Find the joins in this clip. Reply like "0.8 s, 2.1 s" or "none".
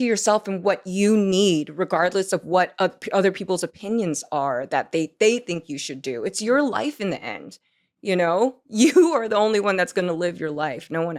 none